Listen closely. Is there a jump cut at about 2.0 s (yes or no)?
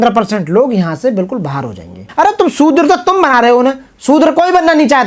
yes